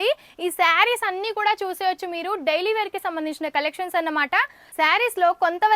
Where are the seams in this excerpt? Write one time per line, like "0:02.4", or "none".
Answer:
0:04.6